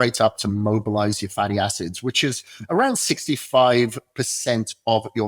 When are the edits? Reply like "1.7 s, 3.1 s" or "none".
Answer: none